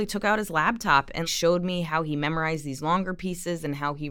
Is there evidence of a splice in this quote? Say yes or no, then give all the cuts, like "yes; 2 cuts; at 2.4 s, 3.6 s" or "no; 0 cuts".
yes; 1 cut; at 1.3 s